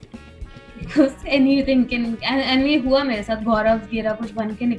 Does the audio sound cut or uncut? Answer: uncut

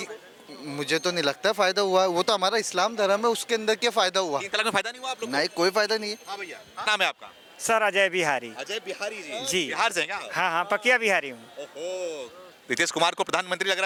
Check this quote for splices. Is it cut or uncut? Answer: uncut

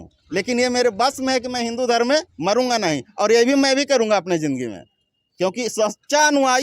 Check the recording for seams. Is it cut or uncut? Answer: uncut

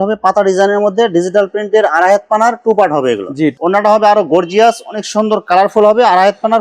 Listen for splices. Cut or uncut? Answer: cut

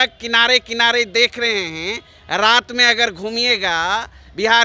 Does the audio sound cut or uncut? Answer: uncut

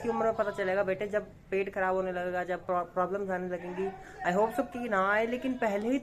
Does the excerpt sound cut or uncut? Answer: uncut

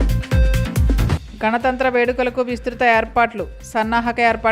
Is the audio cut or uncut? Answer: uncut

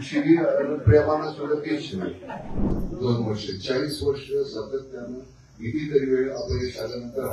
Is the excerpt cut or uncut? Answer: cut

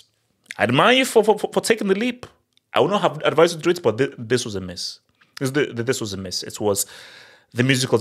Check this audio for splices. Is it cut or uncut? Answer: uncut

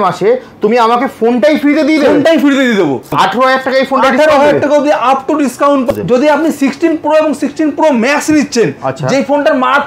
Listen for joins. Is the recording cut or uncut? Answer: cut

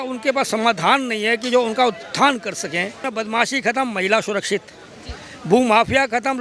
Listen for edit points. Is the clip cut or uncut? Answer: cut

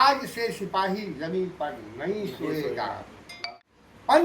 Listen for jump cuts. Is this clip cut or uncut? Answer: cut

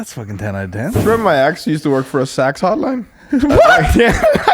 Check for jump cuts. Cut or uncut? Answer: cut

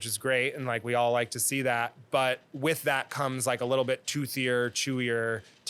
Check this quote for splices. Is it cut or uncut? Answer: uncut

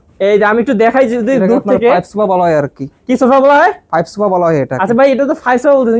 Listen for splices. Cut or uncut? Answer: uncut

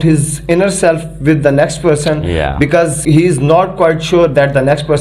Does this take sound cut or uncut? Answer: cut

